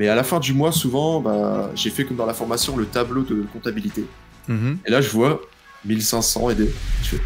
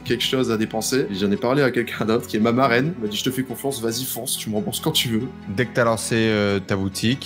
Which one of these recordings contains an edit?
second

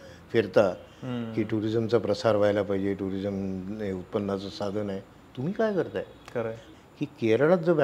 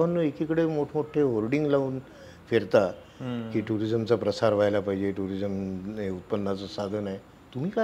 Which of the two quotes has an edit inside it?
first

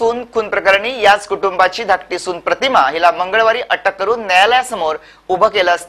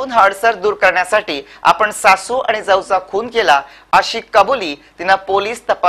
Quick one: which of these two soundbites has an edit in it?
second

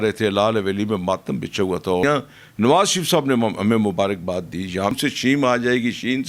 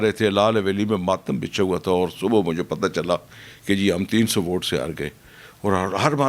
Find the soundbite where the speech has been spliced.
first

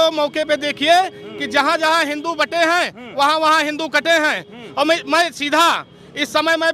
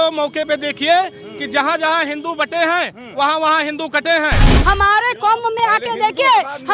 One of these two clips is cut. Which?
second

